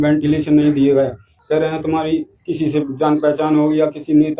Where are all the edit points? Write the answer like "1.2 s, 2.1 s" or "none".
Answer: 1.3 s